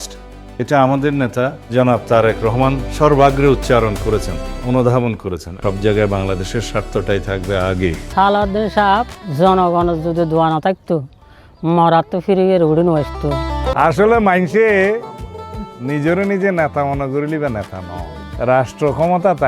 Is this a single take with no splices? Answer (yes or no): no